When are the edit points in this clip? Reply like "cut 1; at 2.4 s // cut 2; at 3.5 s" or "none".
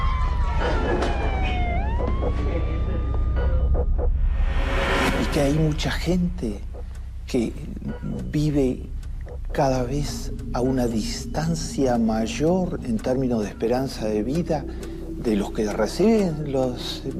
none